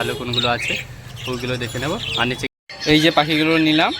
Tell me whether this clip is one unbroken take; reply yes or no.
no